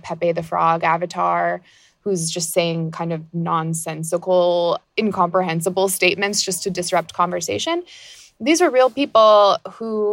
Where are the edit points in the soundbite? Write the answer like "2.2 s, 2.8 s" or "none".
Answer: 4.9 s